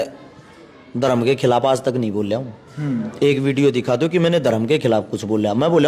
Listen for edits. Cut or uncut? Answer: uncut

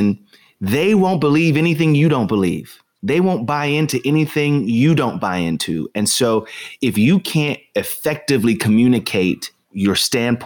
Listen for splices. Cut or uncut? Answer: uncut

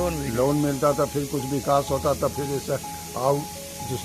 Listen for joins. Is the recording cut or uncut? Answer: uncut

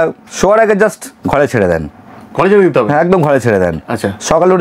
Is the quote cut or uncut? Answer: uncut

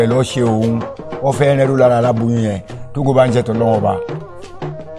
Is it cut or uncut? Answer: uncut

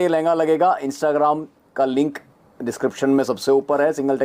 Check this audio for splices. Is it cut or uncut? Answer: uncut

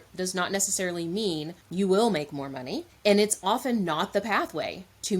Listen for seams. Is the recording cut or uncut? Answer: cut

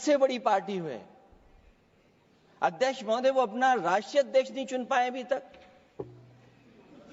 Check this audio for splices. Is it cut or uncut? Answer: uncut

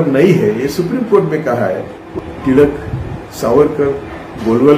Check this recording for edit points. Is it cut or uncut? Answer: cut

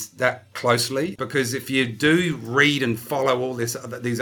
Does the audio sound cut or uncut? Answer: cut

